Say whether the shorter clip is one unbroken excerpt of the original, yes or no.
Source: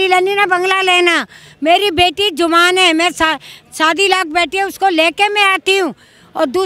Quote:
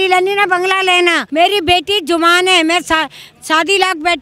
no